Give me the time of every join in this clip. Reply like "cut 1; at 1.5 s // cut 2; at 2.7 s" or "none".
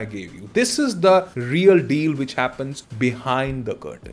cut 1; at 1.6 s // cut 2; at 2.8 s